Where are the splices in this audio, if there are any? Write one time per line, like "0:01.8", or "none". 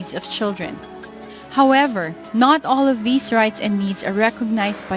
0:03.8